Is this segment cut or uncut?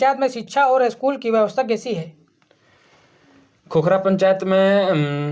uncut